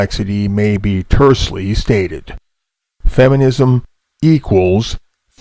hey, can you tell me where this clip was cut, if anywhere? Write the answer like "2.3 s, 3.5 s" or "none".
2.6 s